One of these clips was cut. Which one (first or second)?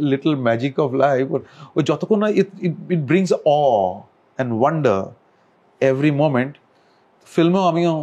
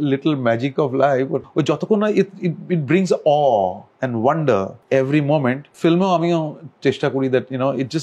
second